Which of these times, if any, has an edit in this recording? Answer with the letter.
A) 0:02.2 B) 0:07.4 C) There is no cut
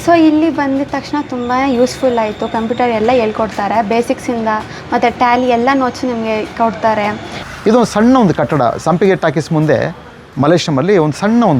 B